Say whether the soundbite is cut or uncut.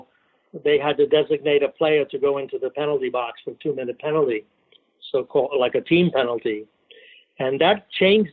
uncut